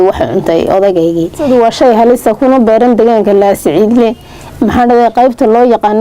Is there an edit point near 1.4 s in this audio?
yes; 1 cut; at 1.4 s

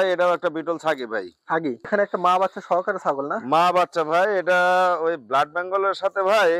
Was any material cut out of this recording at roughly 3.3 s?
no; 1 cut; at 1.9 s

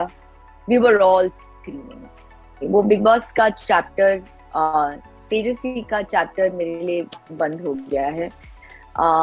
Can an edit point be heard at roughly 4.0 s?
no; 1 cut; at 2.5 s

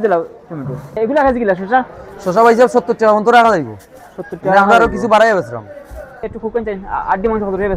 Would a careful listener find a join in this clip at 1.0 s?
yes; 2 cuts; at 1.0 s, 6.3 s

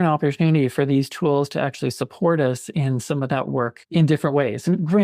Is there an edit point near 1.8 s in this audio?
no; 1 cut; at 3.8 s

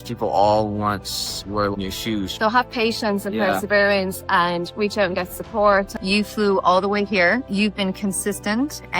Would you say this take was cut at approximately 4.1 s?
no; 3 cuts; at 1.7 s, 5.9 s, 7.5 s

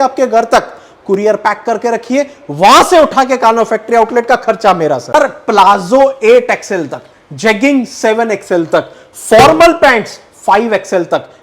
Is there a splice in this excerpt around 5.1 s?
yes; 1 cut; at 5.1 s

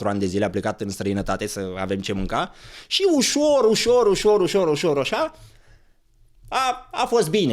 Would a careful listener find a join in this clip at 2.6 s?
no; 0 cuts

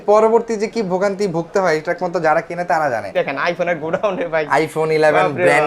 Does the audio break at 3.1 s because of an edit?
yes; 1 cut; at 3.1 s

